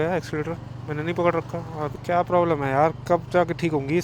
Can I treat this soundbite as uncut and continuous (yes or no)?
no